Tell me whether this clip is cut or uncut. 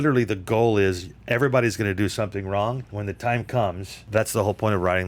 cut